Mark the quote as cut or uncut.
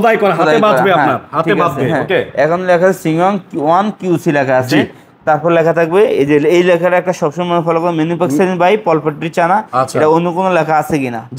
uncut